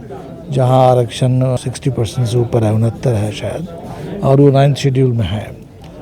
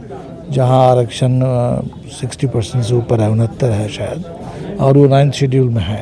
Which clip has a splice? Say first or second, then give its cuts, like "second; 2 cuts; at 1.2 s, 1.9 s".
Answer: first; 1 cut; at 1.6 s